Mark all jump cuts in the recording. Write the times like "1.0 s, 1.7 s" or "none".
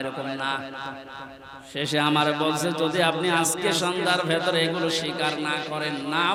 none